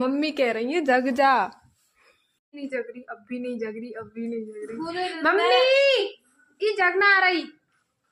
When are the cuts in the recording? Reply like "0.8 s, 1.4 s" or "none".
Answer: none